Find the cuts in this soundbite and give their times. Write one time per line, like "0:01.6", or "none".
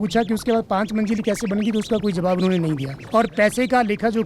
0:02.9